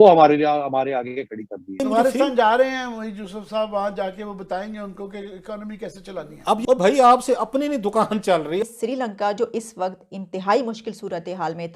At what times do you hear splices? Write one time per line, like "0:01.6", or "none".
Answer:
0:01.8
0:06.6
0:08.7